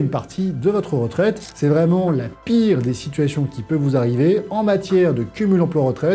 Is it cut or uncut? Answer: cut